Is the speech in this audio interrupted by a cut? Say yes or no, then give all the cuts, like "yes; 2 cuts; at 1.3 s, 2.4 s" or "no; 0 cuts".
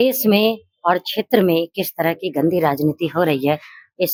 no; 0 cuts